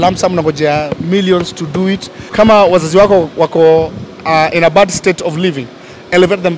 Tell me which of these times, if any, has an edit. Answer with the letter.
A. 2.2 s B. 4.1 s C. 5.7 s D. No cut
A